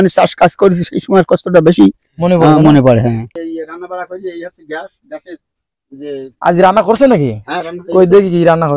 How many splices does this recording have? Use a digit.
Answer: 1